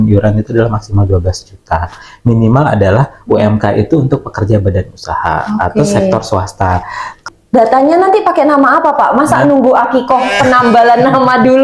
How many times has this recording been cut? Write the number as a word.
one